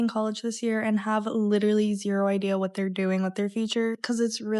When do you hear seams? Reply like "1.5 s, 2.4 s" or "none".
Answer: none